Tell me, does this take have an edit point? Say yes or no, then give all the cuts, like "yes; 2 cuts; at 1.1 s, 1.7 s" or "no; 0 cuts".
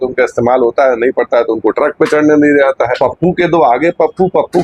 yes; 1 cut; at 2.9 s